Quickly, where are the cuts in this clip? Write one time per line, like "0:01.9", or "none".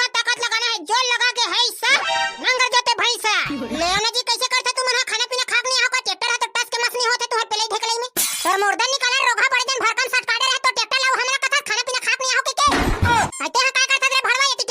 0:03.7
0:13.3